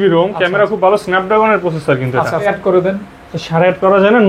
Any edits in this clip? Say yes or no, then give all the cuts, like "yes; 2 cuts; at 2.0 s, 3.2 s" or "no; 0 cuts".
yes; 1 cut; at 2.5 s